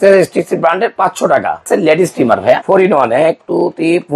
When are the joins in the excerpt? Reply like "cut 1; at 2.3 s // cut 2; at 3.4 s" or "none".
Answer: cut 1; at 1.7 s // cut 2; at 2.6 s